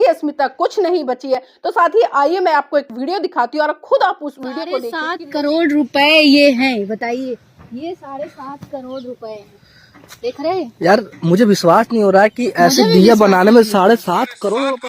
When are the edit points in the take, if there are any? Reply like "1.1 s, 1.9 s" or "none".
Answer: 5.0 s